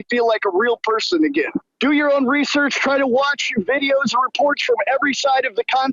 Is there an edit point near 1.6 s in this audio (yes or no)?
yes